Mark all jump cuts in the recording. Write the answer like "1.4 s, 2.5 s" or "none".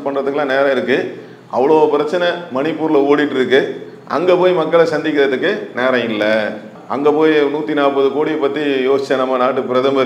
none